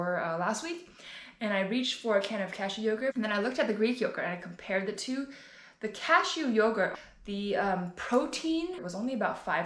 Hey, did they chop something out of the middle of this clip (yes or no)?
yes